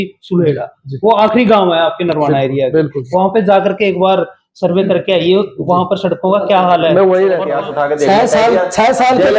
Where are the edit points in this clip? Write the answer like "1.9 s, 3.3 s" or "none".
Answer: 7.5 s